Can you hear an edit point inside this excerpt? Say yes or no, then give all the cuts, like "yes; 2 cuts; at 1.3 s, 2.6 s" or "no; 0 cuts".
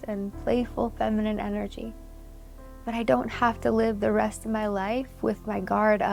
no; 0 cuts